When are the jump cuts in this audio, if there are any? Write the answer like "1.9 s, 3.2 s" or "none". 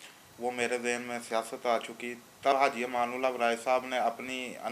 2.5 s